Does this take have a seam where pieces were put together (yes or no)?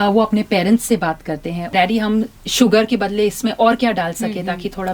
yes